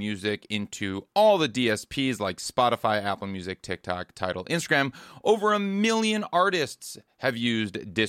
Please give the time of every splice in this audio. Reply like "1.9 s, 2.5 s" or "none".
none